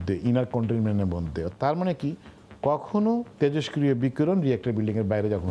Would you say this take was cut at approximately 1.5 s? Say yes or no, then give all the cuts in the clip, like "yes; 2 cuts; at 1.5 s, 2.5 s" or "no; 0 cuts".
no; 0 cuts